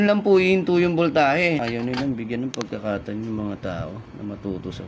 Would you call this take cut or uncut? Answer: cut